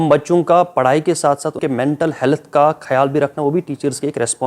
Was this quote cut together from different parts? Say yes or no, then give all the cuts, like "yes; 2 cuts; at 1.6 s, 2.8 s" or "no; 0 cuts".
yes; 1 cut; at 1.6 s